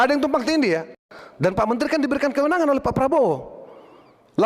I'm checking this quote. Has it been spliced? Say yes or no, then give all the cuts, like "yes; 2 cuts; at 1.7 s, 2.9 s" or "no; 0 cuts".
yes; 1 cut; at 1.0 s